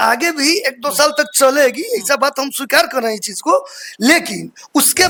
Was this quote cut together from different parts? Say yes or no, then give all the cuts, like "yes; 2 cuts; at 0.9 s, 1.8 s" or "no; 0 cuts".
no; 0 cuts